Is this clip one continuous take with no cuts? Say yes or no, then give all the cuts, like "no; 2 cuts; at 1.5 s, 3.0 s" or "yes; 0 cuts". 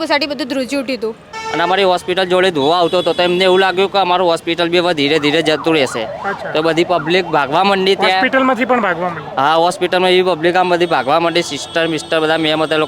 no; 1 cut; at 1.4 s